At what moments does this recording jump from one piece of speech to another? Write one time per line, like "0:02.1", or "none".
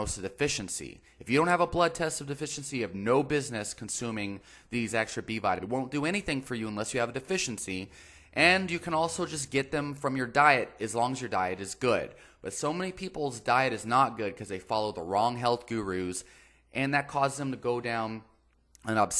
0:05.6